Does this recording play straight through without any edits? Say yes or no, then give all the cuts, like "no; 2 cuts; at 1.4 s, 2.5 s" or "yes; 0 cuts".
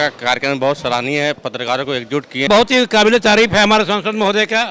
no; 1 cut; at 2.5 s